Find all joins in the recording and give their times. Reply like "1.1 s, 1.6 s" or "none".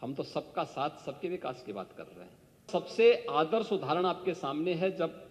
2.7 s